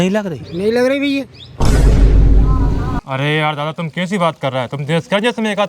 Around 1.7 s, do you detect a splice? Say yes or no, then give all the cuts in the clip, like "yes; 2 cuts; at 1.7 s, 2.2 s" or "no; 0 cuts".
no; 1 cut; at 3.0 s